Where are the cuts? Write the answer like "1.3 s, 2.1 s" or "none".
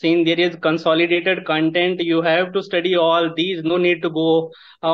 none

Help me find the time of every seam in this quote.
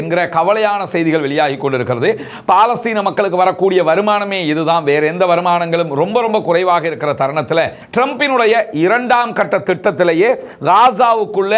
7.8 s

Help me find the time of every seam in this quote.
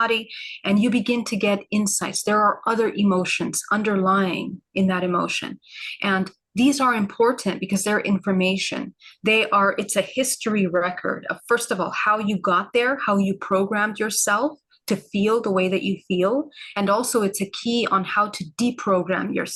none

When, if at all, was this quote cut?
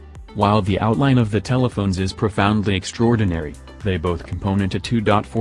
none

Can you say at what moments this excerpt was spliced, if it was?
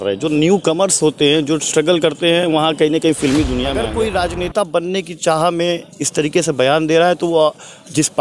3.7 s

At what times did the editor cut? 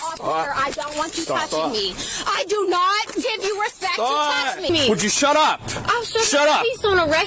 4.7 s

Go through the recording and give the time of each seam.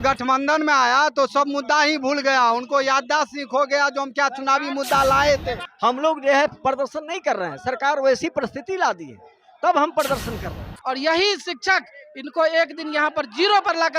5.6 s, 10.7 s

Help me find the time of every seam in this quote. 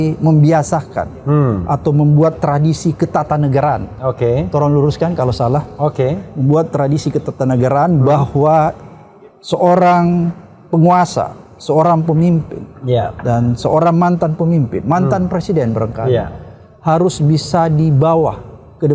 none

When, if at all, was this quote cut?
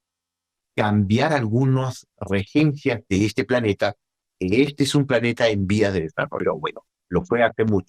none

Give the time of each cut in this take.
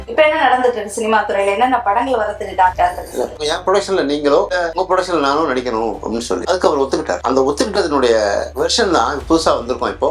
3.3 s

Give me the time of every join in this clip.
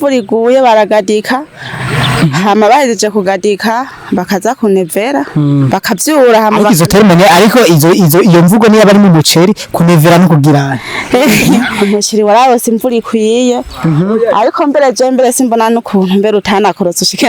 11.6 s

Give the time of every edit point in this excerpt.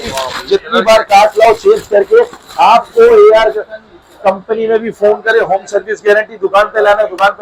none

